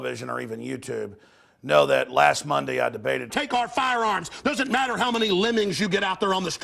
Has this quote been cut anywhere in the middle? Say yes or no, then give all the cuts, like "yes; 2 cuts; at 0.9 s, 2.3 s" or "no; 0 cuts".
no; 0 cuts